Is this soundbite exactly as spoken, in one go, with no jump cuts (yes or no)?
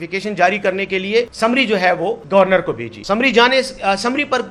no